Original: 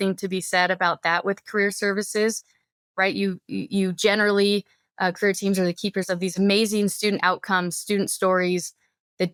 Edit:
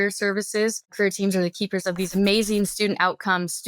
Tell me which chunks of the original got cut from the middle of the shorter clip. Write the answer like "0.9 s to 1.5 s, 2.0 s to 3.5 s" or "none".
2.5 s to 5.2 s